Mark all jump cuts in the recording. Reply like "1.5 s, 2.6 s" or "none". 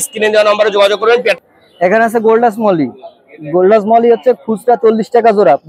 1.4 s